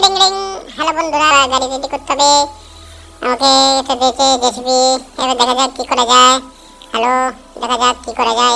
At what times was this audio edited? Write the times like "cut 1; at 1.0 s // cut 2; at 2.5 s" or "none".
cut 1; at 1.3 s